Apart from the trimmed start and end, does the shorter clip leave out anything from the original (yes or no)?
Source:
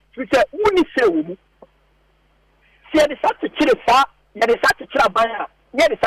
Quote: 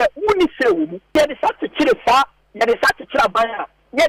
yes